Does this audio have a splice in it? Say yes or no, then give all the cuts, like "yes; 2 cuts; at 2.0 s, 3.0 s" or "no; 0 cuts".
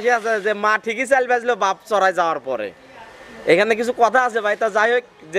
no; 0 cuts